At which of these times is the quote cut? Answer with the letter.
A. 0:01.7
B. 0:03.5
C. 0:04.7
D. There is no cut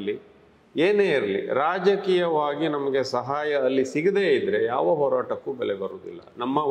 D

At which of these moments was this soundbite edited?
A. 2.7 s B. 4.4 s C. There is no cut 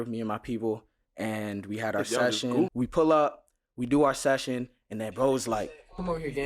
A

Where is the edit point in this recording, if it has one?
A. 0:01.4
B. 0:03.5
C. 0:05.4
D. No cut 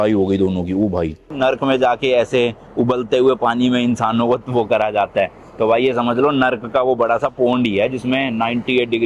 A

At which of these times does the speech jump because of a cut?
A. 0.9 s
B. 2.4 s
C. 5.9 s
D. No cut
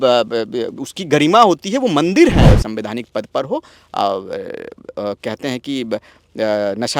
B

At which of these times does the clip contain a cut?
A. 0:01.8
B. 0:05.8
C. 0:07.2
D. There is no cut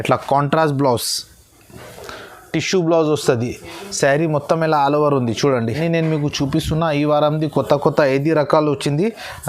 B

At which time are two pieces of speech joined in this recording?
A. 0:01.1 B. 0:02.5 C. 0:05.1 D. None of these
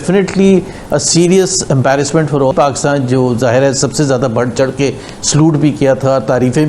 B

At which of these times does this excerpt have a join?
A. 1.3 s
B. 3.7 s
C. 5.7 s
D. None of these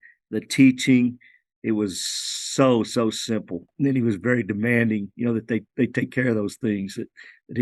B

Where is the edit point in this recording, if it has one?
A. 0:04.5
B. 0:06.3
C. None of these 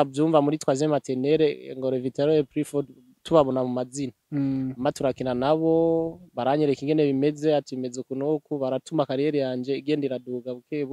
C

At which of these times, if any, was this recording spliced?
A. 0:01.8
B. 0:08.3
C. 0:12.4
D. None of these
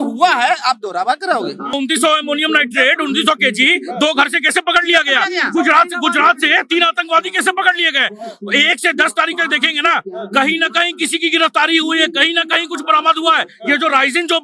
A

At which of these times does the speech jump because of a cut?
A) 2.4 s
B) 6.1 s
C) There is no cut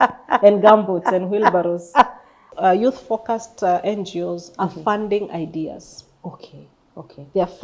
A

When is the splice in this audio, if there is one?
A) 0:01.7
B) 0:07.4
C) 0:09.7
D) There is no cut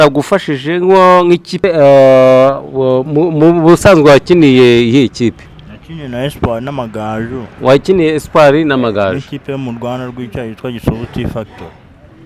A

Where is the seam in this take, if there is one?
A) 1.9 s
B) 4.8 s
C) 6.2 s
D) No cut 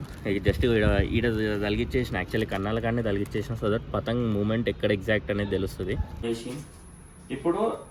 C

